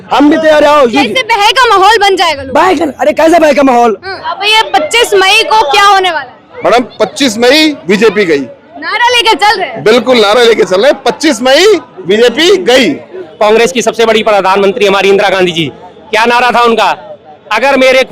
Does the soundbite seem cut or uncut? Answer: cut